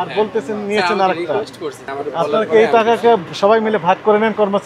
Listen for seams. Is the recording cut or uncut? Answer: cut